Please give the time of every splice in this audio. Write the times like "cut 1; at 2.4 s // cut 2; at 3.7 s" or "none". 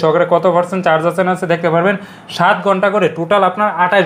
none